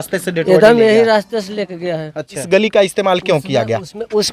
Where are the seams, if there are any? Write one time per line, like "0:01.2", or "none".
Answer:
0:02.4